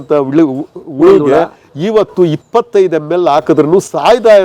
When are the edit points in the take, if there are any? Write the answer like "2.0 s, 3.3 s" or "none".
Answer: none